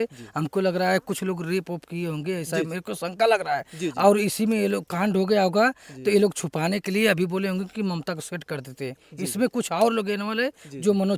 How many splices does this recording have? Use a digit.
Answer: 0